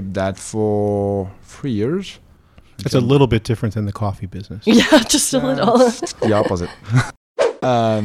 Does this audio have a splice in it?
yes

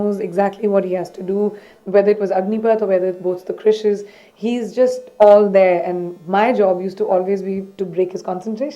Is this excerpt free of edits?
yes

